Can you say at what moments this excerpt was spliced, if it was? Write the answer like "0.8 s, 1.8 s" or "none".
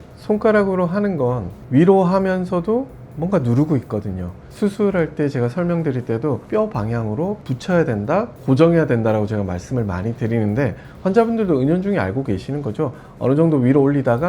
1.5 s, 4.5 s, 6.4 s, 7.4 s